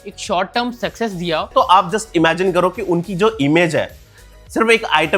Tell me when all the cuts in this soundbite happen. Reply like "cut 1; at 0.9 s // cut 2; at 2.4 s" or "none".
cut 1; at 1.5 s